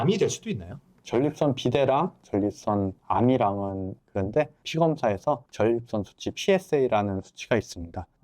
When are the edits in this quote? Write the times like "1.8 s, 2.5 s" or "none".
0.9 s, 3.9 s